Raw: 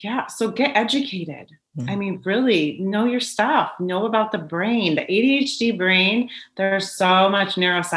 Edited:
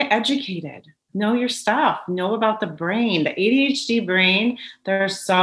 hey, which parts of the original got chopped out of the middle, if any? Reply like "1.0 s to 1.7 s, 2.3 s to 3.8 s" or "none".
1.7 s to 2.8 s

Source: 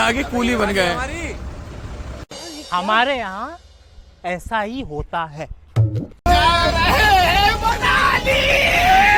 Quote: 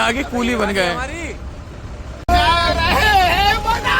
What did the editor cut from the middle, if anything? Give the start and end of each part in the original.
2.1 s to 6.1 s

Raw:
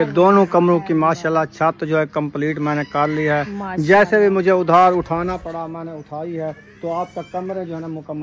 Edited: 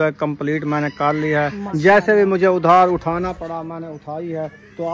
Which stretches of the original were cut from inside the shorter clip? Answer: 3.6 s to 3.7 s

